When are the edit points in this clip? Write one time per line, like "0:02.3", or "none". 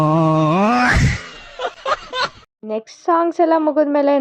0:02.5

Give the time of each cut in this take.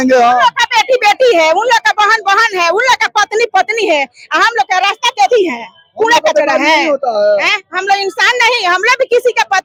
none

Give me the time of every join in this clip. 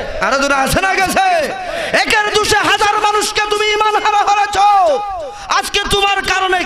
none

